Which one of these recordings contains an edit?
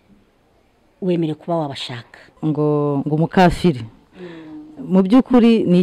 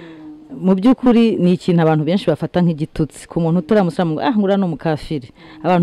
first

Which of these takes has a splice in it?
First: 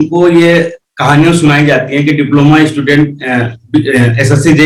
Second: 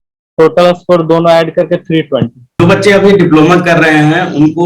second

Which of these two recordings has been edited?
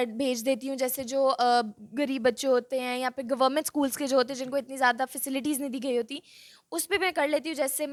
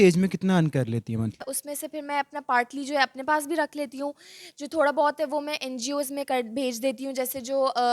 second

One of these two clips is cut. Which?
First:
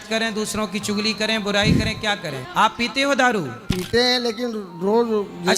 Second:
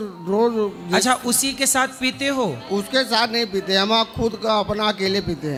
first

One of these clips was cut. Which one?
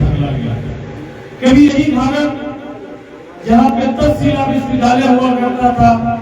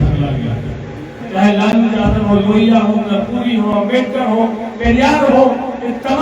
second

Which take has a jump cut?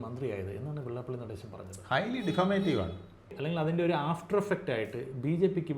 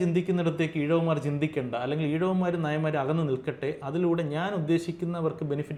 first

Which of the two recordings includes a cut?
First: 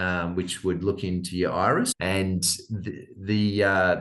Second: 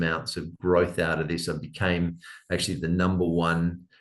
first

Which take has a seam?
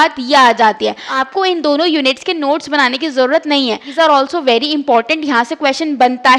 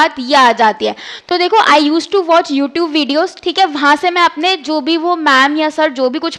first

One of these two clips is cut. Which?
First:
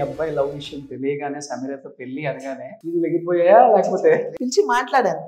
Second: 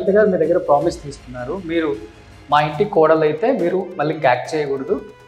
first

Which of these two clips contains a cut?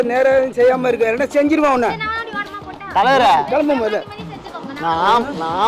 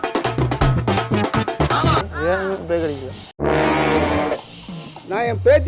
second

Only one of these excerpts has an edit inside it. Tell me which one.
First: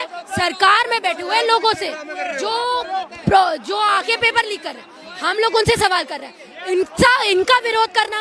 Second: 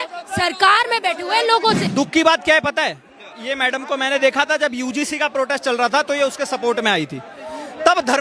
second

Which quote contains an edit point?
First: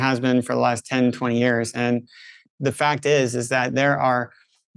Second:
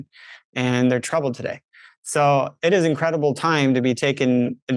first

